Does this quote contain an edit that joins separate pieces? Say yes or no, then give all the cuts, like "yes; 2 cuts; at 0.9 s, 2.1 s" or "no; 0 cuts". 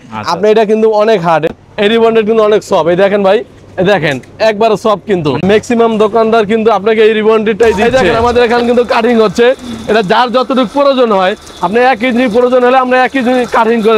yes; 3 cuts; at 1.5 s, 5.4 s, 7.9 s